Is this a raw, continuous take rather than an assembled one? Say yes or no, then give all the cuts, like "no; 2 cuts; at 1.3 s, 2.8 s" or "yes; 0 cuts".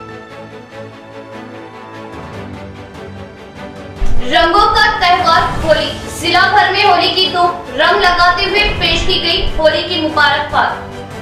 no; 1 cut; at 1.8 s